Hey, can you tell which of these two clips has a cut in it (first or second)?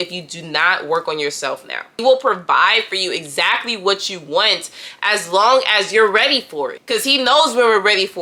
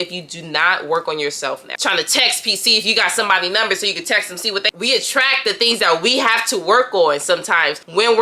second